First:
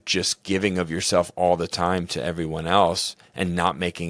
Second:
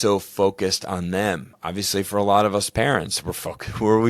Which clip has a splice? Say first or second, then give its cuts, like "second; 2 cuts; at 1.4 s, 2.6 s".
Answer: second; 1 cut; at 1.5 s